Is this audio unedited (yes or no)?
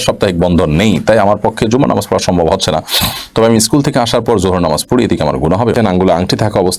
no